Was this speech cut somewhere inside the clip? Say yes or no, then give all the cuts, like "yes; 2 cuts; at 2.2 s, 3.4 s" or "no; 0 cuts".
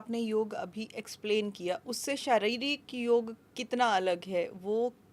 no; 0 cuts